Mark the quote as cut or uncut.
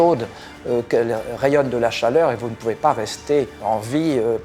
cut